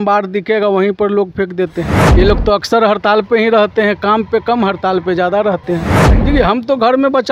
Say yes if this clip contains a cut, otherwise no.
yes